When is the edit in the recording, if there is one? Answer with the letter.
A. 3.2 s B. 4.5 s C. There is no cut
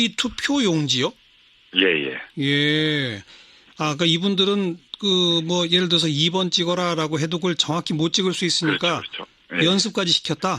B